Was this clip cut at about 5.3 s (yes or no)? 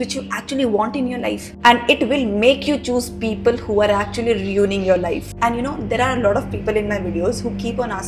yes